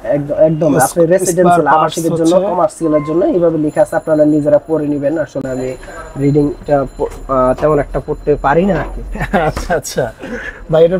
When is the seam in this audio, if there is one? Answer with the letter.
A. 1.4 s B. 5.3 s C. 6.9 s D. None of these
D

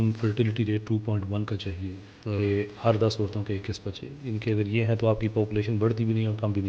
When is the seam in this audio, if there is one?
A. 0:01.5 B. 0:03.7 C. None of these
C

